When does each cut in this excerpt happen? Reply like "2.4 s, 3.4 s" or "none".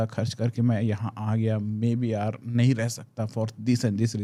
none

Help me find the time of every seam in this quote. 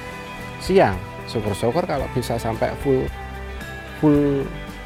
none

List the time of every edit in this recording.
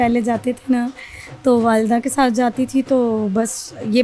none

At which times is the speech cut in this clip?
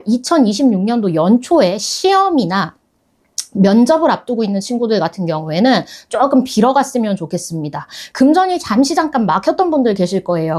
8.0 s

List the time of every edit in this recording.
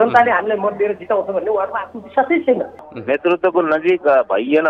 2.8 s

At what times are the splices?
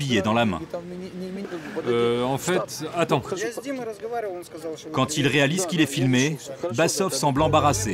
1.5 s

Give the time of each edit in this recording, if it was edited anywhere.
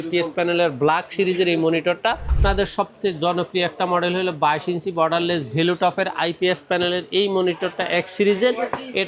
2.3 s

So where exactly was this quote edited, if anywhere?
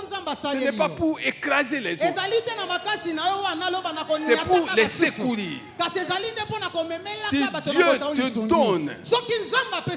none

